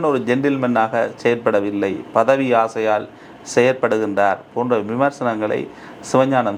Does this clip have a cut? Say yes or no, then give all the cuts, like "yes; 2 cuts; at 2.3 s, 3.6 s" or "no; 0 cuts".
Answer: no; 0 cuts